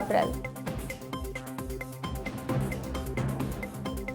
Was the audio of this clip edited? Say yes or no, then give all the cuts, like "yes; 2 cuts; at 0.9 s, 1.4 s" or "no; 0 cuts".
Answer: no; 0 cuts